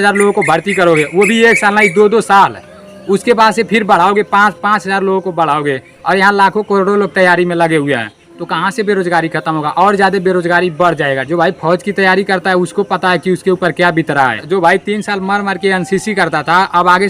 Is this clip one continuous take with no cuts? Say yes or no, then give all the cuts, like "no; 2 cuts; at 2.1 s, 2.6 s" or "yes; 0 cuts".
no; 2 cuts; at 11.2 s, 14.4 s